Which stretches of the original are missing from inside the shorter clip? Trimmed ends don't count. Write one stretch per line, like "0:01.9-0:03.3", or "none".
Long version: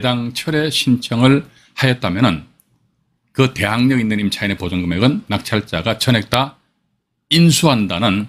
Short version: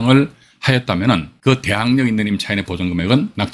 0:02.5-0:03.2